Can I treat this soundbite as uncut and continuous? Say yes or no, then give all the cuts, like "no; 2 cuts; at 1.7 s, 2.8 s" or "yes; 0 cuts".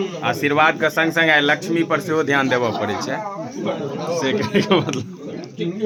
yes; 0 cuts